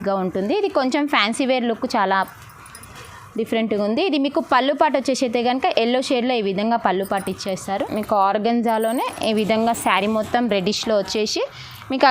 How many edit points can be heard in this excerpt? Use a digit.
1